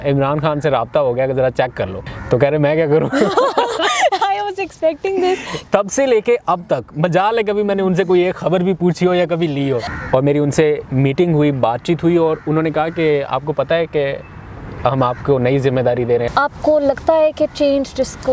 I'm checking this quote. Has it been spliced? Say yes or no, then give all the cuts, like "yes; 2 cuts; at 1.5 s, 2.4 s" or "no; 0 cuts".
yes; 4 cuts; at 2.0 s, 5.6 s, 9.9 s, 16.3 s